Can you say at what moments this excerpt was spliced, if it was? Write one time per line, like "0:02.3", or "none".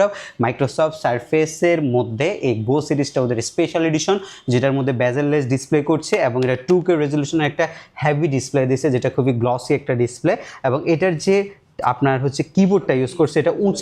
none